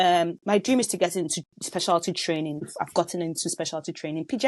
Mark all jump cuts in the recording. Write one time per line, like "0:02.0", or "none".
none